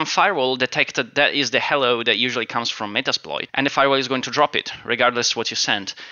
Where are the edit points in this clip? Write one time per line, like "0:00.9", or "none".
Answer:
0:03.4